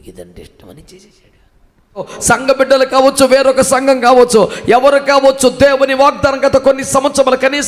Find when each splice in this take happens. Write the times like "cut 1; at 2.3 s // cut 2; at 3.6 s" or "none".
cut 1; at 2.2 s

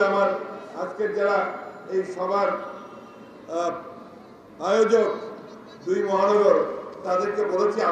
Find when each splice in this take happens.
none

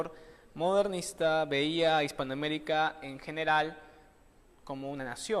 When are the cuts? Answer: cut 1; at 2.2 s

